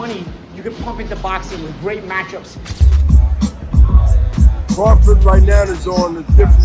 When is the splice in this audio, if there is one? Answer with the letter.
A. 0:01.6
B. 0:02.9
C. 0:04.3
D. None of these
B